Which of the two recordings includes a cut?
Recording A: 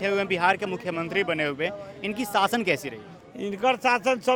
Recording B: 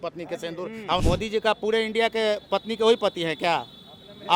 B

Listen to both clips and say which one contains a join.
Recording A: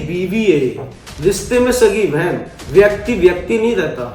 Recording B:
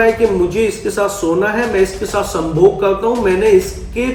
A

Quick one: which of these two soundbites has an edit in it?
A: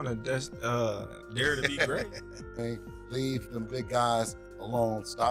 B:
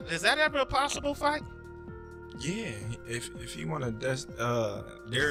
A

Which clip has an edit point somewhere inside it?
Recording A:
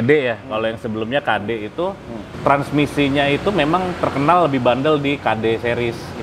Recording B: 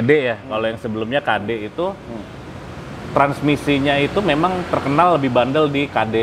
A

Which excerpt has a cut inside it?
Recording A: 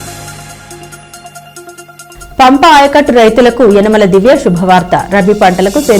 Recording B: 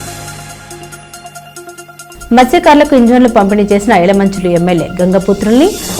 A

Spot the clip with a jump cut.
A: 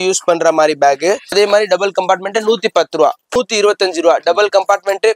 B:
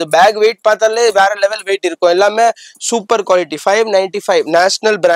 A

